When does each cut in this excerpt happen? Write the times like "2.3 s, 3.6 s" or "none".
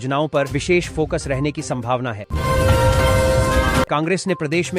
2.0 s, 3.9 s